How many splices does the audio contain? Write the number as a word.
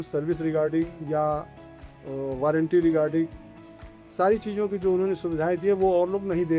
zero